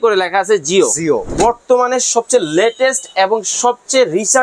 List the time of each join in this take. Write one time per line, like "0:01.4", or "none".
0:01.3

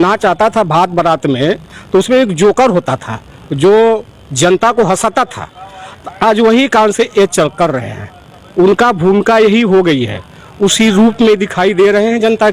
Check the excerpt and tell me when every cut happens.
none

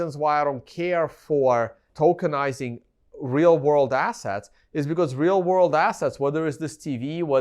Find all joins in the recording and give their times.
0:01.8

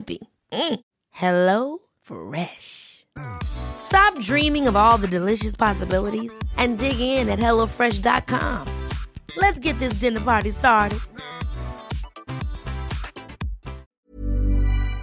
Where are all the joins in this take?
0:13.9

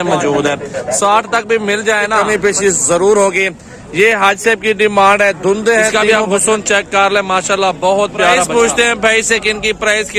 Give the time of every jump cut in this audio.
0:02.2
0:06.0
0:08.4

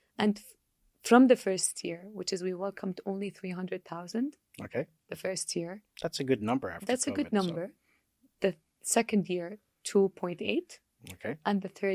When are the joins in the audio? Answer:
none

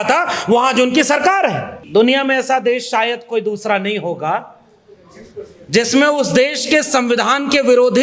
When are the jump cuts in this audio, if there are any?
0:01.8

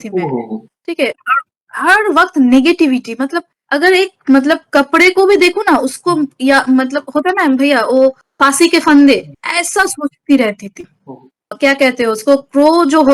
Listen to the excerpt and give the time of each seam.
0:11.5

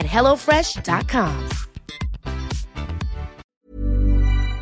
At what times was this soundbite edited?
0:03.4

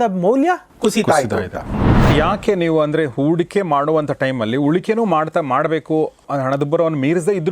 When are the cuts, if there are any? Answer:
0:02.1
0:06.3

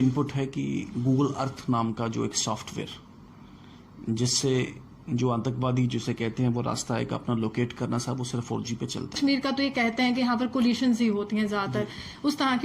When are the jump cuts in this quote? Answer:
0:09.2

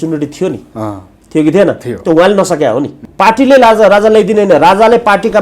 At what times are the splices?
0:03.0

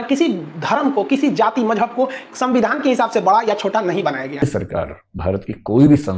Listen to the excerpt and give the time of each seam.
0:04.4

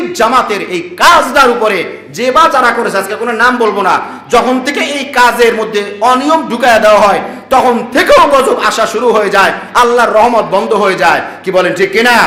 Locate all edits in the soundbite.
none

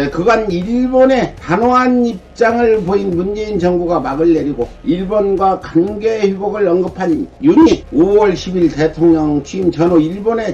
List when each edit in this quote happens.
none

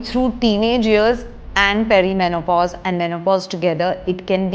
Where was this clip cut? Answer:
none

